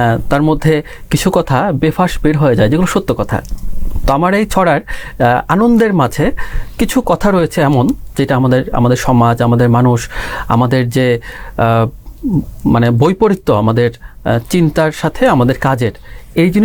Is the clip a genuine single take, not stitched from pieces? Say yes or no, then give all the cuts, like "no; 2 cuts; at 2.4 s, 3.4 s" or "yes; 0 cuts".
yes; 0 cuts